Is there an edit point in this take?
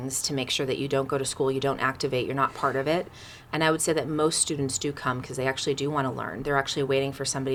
no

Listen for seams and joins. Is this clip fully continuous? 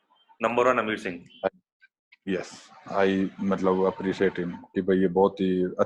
yes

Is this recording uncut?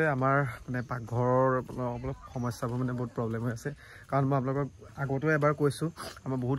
yes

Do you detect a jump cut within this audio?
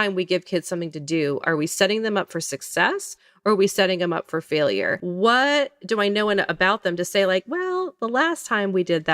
yes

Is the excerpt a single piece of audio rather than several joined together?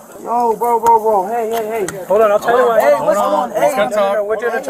yes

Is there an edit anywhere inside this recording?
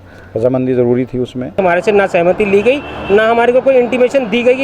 yes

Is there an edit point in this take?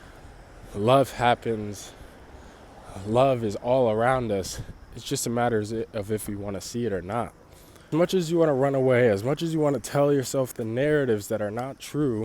yes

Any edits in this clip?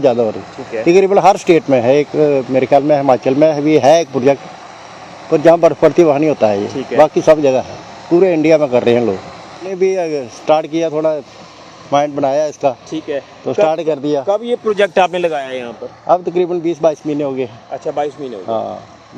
yes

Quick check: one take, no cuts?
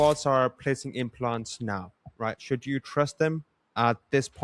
yes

